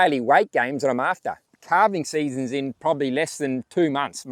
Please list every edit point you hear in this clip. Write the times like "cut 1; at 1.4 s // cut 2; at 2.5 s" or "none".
cut 1; at 1.6 s